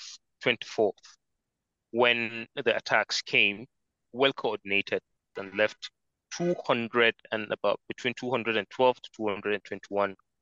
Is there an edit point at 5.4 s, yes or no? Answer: yes